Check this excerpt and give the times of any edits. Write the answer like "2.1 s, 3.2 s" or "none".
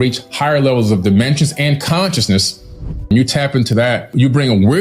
3.0 s